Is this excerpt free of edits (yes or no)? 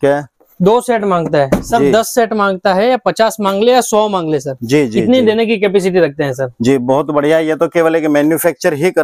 yes